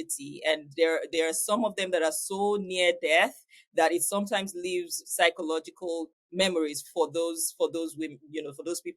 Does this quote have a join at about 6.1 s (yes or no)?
yes